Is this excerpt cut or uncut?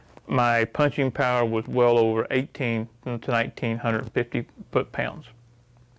uncut